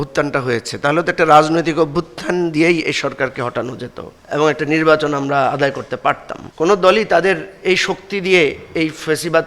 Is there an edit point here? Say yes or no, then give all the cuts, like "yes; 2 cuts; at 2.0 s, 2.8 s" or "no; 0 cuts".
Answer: yes; 1 cut; at 6.4 s